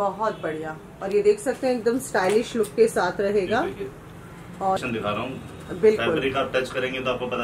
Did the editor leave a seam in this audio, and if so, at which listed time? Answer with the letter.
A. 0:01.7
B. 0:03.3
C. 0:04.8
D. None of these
C